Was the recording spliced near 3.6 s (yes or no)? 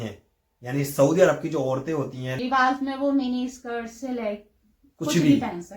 no